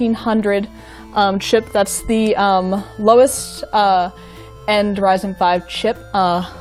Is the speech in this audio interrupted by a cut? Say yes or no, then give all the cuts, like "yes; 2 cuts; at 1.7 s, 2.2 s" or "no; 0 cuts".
yes; 1 cut; at 1.8 s